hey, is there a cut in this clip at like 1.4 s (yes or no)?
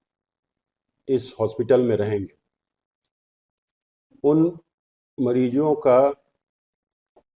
no